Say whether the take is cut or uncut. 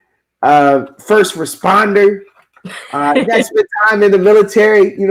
uncut